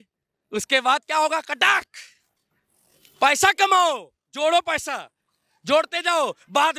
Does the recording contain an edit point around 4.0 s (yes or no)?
no